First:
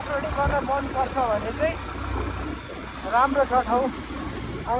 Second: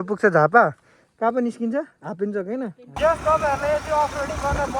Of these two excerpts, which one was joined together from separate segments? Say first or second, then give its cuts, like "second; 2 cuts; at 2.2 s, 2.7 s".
second; 1 cut; at 2.8 s